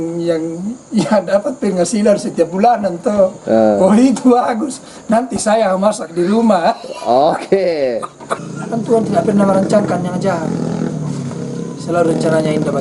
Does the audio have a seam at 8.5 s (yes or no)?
yes